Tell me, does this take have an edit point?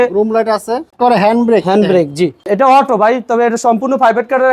yes; 2 cuts; at 0.9 s, 2.5 s

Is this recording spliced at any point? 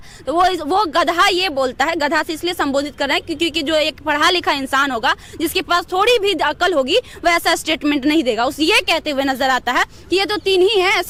no; 0 cuts

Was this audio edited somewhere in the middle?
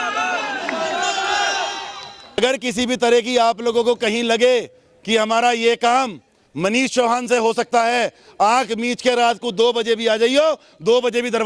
yes; 1 cut; at 2.2 s

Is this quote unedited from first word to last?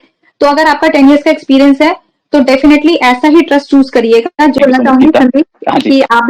no; 1 cut; at 4.6 s

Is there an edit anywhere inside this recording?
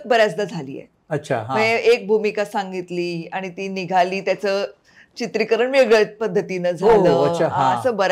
no; 0 cuts

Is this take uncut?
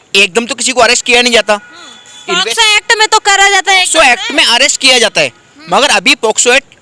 yes; 0 cuts

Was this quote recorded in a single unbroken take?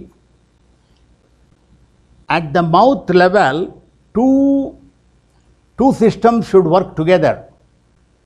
yes; 0 cuts

